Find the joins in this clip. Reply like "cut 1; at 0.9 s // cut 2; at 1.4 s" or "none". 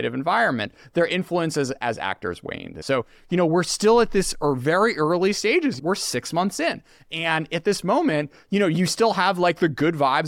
cut 1; at 2.7 s // cut 2; at 5.8 s